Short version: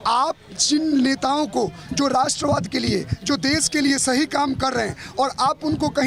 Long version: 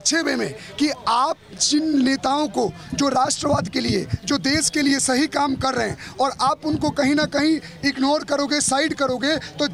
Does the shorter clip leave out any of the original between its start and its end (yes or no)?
no